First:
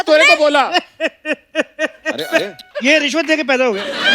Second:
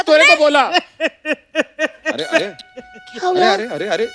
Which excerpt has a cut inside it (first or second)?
first